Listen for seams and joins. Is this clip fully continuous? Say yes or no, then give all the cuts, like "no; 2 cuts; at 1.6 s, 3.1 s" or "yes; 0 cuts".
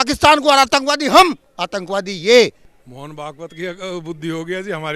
no; 1 cut; at 2.7 s